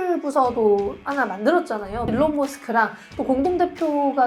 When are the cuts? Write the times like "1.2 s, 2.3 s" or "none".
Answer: 2.1 s